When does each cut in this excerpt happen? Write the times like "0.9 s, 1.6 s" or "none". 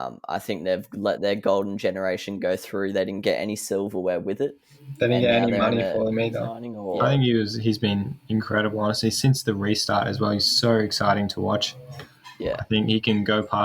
6.7 s